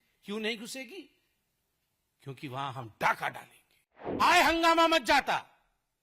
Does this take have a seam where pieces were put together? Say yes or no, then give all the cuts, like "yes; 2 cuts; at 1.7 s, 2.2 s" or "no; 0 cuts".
yes; 1 cut; at 4.2 s